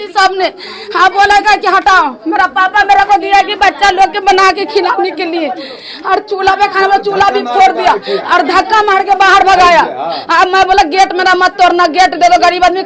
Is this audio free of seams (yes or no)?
yes